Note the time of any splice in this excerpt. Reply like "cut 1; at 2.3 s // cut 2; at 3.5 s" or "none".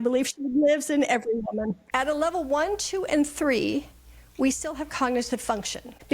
cut 1; at 1.8 s

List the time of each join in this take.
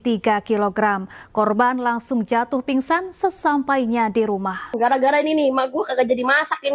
cut 1; at 4.7 s

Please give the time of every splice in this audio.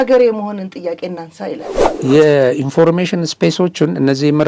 cut 1; at 1.9 s

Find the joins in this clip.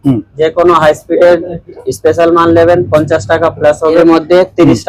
cut 1; at 4.0 s

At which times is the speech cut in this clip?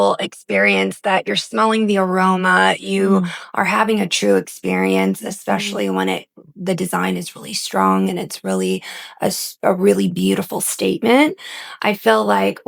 none

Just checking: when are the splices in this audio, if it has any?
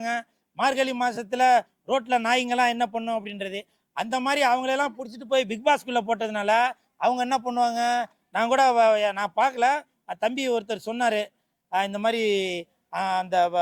none

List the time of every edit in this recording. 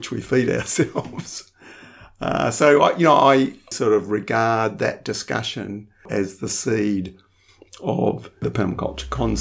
cut 1; at 3.7 s // cut 2; at 8.4 s

